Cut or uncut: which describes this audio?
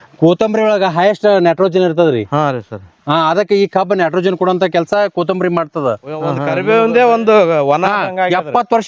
cut